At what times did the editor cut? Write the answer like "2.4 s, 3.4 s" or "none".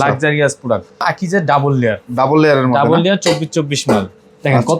1.0 s